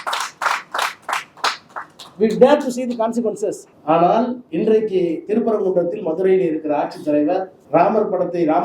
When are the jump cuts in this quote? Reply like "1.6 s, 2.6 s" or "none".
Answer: 3.6 s, 4.4 s, 7.6 s